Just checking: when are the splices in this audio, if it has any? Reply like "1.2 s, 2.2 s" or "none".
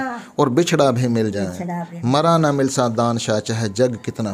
none